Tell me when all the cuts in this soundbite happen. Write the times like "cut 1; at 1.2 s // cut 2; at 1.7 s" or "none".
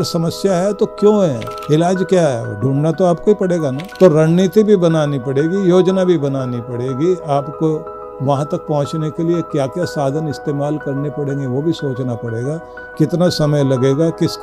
cut 1; at 1.5 s // cut 2; at 3.8 s